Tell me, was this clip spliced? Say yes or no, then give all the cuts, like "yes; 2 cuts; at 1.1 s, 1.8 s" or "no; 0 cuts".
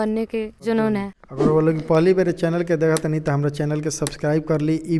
no; 0 cuts